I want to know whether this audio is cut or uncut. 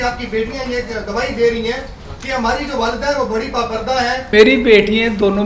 cut